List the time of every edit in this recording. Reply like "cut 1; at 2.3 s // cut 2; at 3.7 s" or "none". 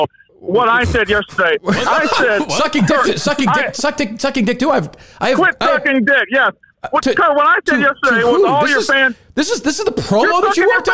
none